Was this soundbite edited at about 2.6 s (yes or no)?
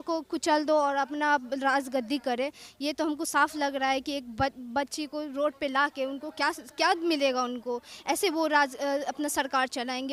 no